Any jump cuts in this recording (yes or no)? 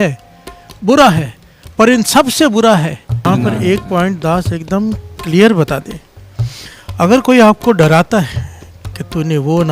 yes